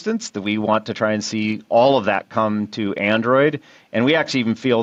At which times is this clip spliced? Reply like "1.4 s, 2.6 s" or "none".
none